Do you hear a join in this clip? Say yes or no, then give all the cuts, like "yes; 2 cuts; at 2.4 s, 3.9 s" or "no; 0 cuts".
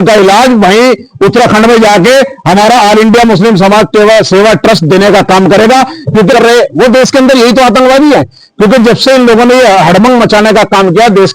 yes; 1 cut; at 6.3 s